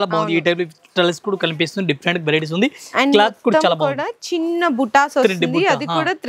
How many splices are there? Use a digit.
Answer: 0